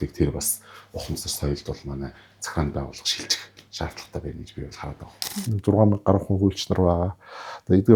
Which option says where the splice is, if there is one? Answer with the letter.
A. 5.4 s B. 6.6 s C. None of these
A